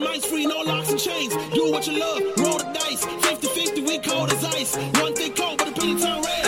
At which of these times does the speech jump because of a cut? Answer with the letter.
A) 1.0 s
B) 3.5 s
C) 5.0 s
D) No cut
D